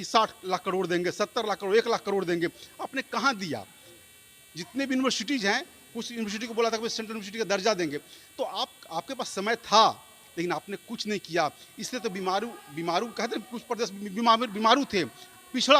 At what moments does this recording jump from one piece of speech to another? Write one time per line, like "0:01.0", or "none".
none

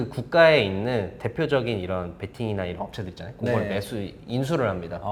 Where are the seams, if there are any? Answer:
none

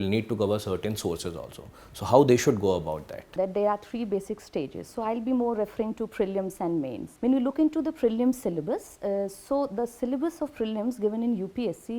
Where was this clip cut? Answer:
0:03.3
0:07.0

